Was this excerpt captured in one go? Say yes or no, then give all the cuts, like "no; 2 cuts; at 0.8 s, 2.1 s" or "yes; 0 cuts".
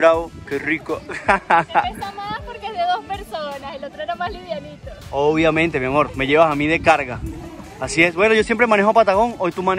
yes; 0 cuts